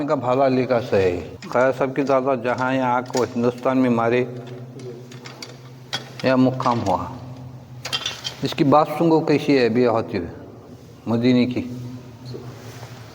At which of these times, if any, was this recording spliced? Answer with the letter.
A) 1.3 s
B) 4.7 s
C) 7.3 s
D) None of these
A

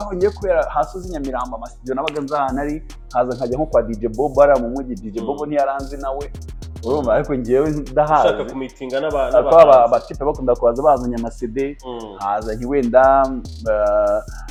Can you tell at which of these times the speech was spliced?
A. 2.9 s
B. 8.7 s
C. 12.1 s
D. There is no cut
D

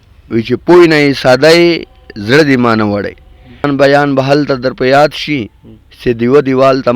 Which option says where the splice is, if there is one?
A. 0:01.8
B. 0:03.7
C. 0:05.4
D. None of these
B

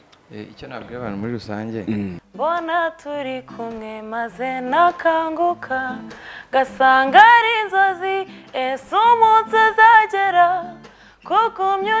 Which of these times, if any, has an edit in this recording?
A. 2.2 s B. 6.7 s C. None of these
A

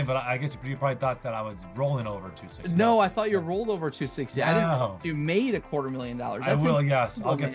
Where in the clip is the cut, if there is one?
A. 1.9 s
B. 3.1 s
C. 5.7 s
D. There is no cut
D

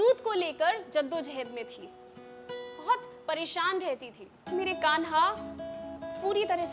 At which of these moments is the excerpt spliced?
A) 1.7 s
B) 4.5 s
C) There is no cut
B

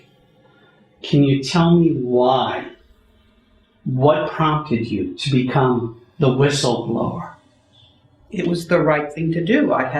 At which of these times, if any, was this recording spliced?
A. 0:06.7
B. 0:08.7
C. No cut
A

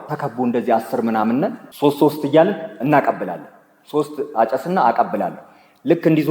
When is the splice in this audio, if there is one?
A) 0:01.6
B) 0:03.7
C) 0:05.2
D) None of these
A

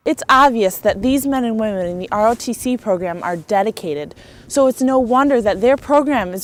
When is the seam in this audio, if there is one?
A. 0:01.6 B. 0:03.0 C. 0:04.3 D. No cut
D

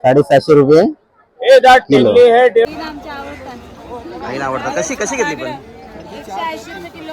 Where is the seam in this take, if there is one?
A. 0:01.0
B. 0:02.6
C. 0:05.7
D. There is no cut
B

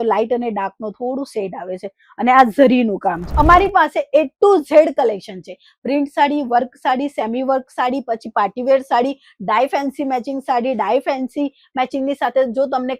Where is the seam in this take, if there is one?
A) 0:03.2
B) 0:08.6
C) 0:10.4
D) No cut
A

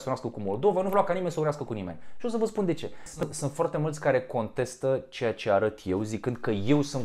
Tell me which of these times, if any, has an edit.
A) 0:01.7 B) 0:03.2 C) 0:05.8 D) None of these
B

